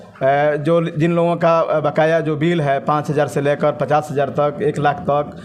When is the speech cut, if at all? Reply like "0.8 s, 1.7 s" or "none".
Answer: none